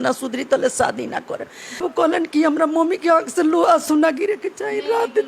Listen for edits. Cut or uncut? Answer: cut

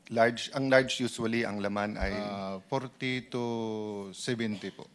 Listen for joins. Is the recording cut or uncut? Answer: uncut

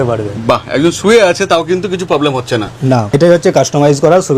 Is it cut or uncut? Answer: cut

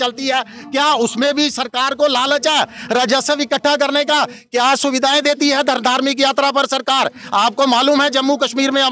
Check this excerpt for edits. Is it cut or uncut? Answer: uncut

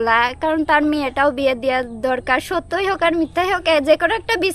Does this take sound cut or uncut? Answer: uncut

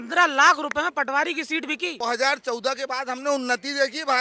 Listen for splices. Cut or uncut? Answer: cut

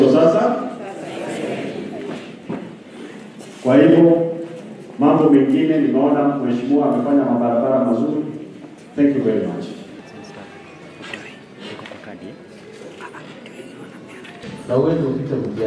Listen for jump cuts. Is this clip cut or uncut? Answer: uncut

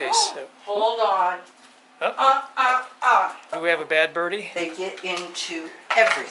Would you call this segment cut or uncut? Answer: cut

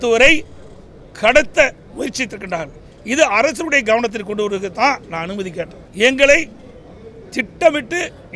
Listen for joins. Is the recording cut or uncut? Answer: cut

